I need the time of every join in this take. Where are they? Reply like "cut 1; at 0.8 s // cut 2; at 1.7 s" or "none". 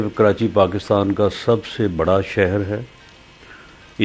none